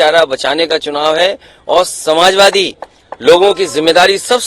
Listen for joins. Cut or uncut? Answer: uncut